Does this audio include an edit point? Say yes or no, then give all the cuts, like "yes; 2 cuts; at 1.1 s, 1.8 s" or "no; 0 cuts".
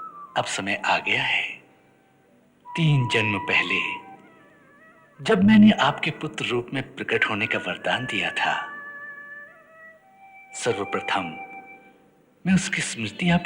yes; 1 cut; at 2.7 s